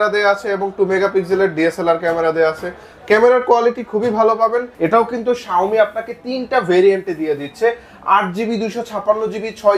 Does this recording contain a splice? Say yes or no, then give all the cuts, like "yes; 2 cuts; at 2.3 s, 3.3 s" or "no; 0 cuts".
yes; 1 cut; at 4.7 s